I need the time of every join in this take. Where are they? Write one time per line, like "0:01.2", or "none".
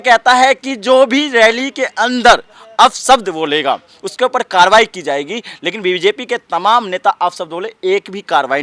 none